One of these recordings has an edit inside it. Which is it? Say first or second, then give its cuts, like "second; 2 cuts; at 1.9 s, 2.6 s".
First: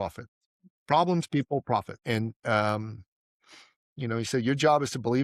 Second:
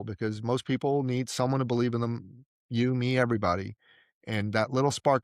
first; 1 cut; at 1.9 s